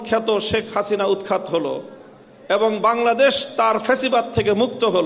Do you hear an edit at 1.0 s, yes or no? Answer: no